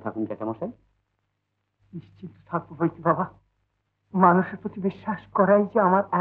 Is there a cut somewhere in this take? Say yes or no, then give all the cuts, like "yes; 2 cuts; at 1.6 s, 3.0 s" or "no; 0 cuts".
no; 0 cuts